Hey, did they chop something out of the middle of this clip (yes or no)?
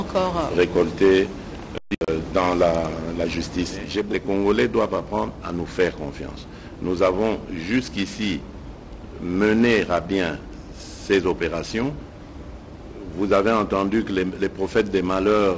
yes